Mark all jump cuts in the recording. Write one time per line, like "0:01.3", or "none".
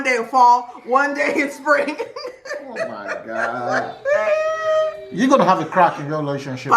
none